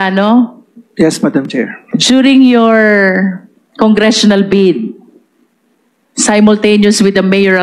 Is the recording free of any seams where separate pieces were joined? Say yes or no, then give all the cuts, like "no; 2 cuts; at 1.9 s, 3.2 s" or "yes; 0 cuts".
no; 1 cut; at 1.8 s